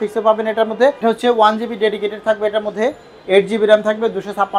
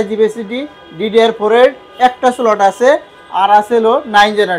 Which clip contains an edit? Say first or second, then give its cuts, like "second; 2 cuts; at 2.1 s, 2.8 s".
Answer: first; 1 cut; at 1.0 s